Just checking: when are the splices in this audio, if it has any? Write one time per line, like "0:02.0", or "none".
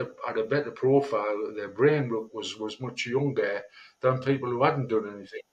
none